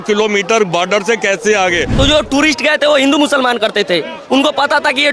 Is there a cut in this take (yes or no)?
yes